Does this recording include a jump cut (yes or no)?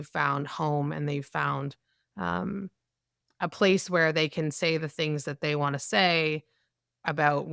no